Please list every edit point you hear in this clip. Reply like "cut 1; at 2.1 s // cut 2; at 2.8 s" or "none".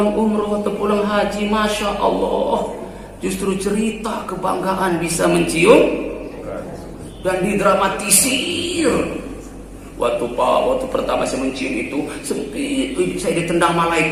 none